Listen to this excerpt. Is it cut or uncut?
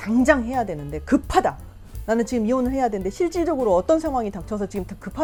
uncut